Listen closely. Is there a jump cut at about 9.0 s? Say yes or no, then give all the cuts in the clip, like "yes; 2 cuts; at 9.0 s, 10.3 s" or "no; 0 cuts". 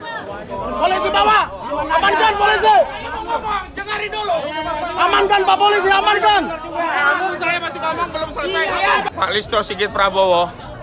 yes; 1 cut; at 9.0 s